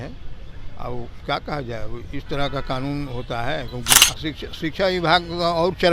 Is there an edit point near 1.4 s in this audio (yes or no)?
no